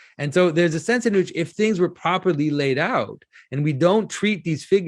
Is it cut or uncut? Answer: uncut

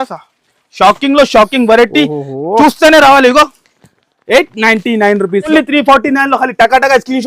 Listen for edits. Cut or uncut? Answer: cut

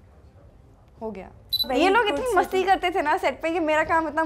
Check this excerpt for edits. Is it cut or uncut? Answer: cut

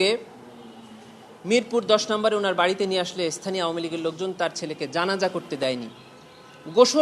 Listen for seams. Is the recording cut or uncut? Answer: uncut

